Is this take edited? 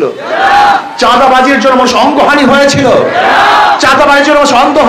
no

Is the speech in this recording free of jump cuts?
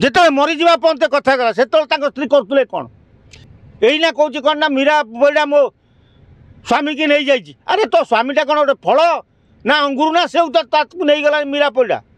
yes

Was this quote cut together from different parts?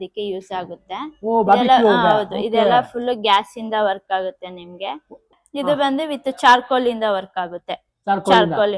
yes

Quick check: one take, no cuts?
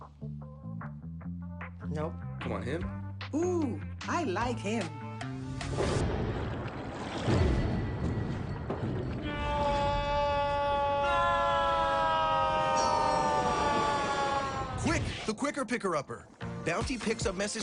yes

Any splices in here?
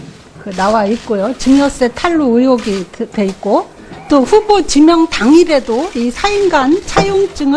yes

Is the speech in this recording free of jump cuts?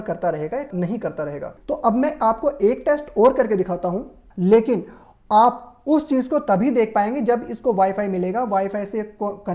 no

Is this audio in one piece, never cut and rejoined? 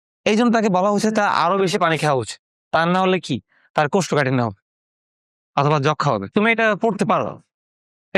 no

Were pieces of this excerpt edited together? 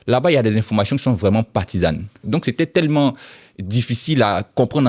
yes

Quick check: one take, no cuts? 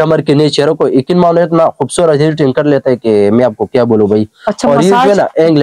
yes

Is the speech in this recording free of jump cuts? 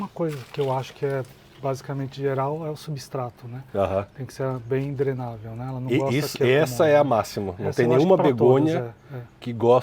yes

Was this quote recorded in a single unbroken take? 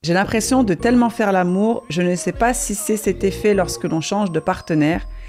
yes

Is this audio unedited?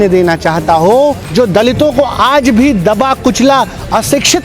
no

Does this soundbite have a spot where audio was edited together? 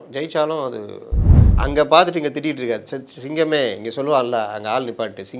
yes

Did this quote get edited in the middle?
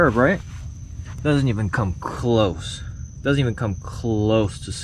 no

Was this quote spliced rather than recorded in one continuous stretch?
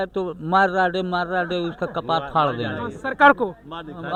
no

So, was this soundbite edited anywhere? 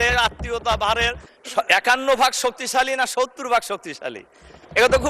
yes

